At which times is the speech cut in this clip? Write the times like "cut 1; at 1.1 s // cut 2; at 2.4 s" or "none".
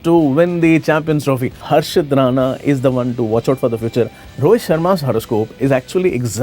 cut 1; at 1.5 s // cut 2; at 4.2 s